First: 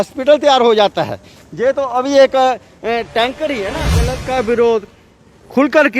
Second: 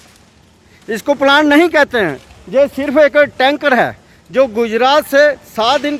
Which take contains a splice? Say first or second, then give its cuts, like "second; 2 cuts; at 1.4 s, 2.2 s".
first; 1 cut; at 4.2 s